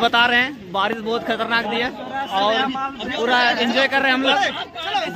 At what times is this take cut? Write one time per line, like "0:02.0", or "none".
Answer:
none